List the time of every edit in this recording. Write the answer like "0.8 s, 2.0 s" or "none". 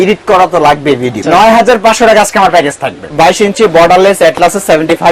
1.2 s, 3.0 s